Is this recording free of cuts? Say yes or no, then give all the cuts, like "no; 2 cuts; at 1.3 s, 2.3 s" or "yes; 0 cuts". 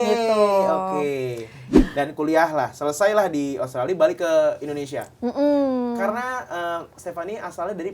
no; 1 cut; at 1.6 s